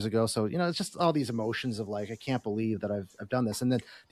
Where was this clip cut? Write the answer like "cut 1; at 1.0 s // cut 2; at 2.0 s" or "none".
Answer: none